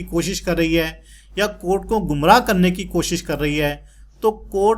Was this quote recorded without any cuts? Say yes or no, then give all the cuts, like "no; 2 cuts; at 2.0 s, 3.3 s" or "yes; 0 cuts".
yes; 0 cuts